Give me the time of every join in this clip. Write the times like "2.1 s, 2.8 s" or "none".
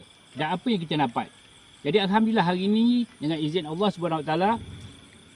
none